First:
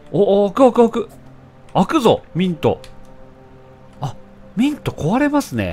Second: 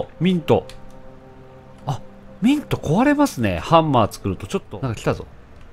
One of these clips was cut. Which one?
second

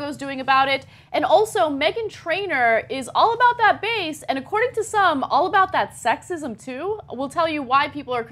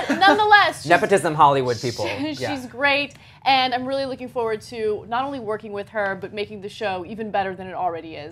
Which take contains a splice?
second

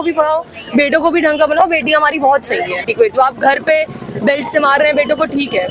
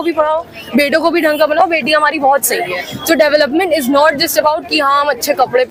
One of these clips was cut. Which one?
first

